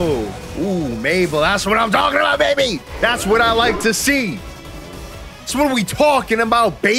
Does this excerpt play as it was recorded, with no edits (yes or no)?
no